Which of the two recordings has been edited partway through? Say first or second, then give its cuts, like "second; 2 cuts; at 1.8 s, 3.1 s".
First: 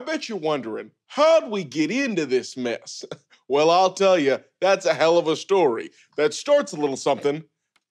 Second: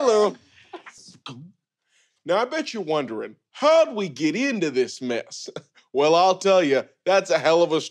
second; 1 cut; at 0.9 s